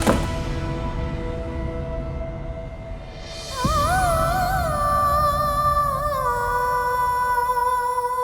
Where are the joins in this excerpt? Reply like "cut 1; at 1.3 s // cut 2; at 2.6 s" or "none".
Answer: none

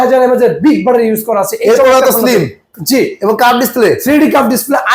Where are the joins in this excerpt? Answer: none

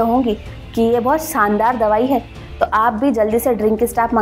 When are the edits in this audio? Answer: none

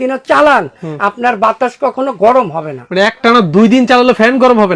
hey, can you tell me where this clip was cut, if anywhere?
none

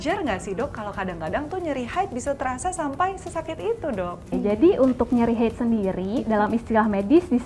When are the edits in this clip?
cut 1; at 4.3 s

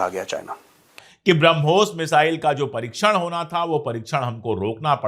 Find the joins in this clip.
cut 1; at 0.9 s

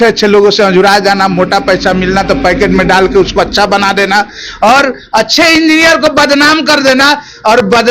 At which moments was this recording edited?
none

